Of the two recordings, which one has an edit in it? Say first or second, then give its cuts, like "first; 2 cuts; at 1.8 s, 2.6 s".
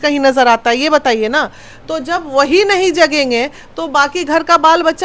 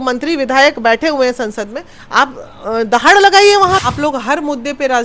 second; 1 cut; at 3.8 s